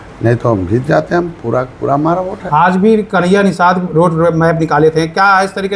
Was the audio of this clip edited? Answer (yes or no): no